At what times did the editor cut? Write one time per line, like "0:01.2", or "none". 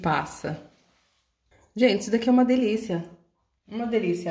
0:01.6